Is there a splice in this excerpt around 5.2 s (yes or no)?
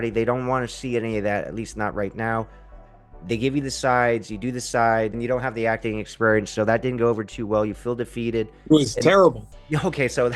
yes